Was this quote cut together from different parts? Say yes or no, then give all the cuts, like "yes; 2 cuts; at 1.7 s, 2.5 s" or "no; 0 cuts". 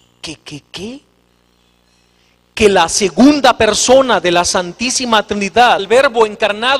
no; 0 cuts